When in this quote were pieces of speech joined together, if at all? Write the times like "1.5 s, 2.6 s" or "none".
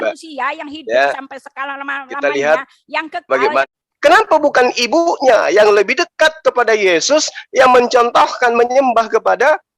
3.6 s